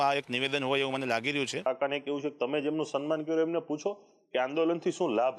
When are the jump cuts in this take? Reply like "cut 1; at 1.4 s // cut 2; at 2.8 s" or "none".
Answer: cut 1; at 1.7 s